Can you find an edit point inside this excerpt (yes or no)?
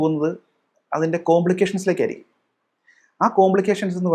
no